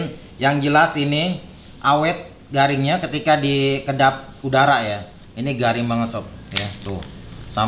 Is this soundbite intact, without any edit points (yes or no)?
yes